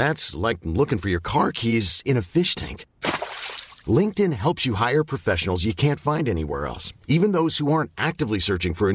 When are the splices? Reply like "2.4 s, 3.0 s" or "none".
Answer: none

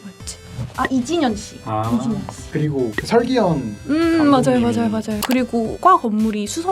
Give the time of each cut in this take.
5.2 s

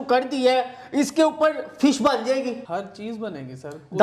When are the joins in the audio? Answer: 2.6 s

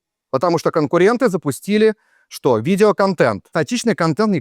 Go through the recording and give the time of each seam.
3.5 s

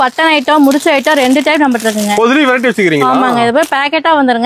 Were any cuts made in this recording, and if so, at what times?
none

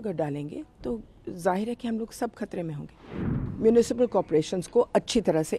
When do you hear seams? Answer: 3.3 s

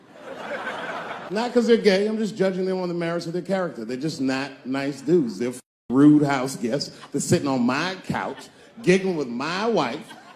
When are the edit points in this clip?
1.3 s

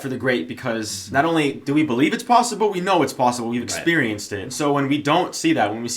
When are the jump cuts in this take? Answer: 0.9 s, 4.5 s

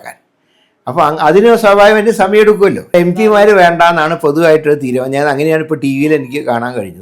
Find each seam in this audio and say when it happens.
2.8 s

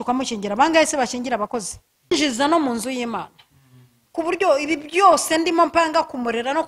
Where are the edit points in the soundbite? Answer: 2.1 s

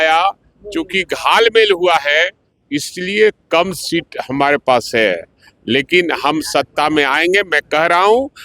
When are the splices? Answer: none

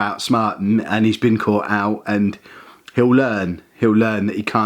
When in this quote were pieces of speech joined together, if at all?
none

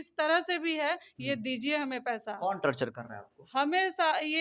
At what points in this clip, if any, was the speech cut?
none

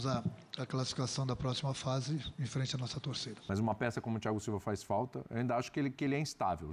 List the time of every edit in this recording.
3.4 s

